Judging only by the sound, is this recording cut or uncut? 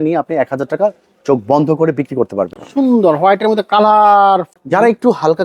cut